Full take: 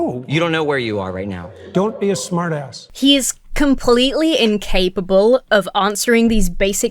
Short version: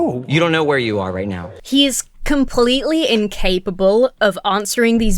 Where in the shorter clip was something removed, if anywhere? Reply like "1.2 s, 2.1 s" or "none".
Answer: 1.5 s

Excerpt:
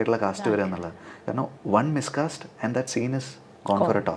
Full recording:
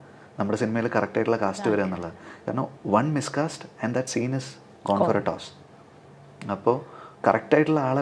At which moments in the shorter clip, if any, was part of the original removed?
none

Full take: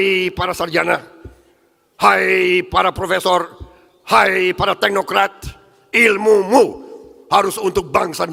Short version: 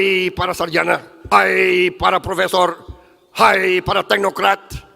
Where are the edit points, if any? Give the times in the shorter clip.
1.1 s

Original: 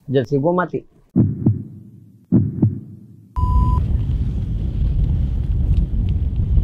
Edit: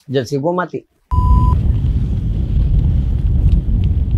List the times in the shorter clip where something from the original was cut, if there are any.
1.0 s

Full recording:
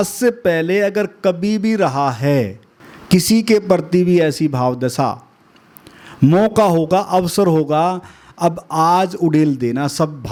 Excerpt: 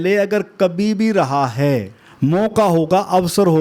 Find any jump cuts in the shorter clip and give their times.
2.0 s

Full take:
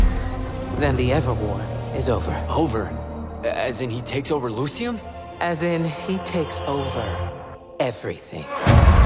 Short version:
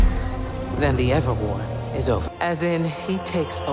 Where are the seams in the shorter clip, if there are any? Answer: 2.3 s

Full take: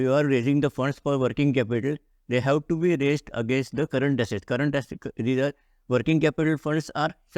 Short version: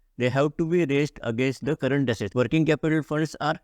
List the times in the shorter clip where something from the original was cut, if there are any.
2.2 s

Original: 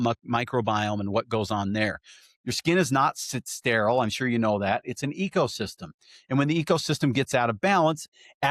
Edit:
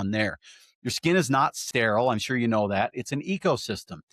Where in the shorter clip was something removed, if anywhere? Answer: 1.6 s

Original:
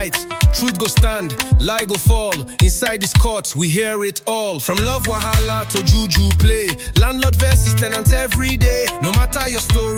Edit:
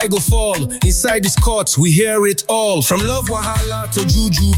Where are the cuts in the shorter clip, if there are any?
none

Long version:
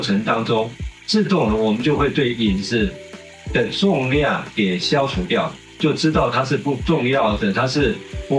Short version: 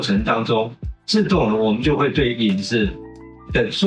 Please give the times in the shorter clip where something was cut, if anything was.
none

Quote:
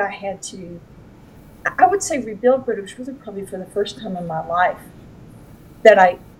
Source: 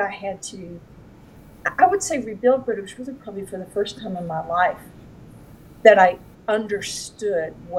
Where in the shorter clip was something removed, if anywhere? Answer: none

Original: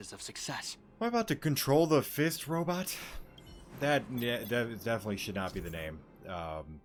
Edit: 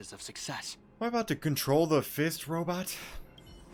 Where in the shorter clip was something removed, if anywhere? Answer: none

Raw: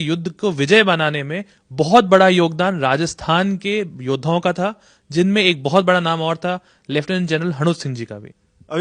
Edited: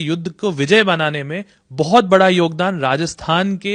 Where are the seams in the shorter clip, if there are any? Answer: none

